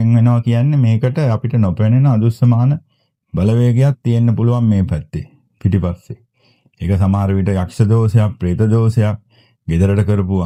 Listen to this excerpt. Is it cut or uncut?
uncut